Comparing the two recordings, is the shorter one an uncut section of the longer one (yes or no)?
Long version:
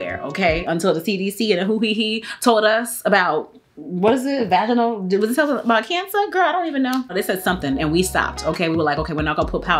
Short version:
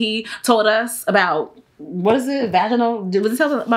yes